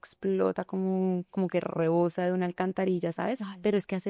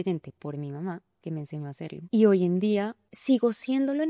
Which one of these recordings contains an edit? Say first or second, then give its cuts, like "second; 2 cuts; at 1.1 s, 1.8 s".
second; 2 cuts; at 2.0 s, 3.0 s